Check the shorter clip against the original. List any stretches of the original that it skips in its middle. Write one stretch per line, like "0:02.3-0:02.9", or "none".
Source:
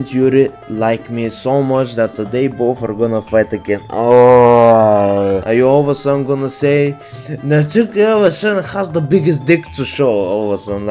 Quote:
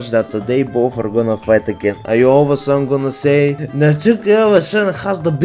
0:03.9-0:05.4
0:07.0-0:07.3